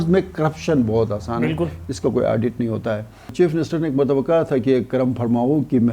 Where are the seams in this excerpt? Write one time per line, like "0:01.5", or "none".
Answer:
0:03.3